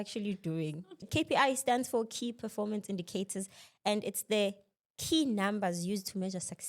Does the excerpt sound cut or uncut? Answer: cut